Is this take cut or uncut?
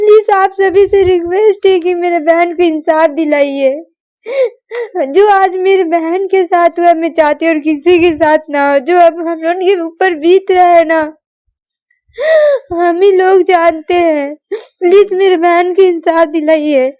uncut